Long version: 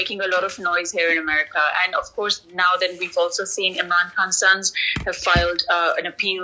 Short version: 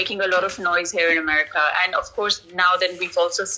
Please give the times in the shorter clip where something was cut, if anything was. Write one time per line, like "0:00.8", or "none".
none